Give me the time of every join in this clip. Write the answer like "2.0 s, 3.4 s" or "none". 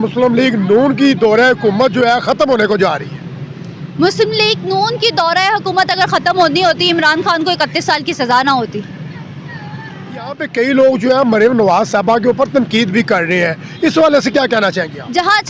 10.4 s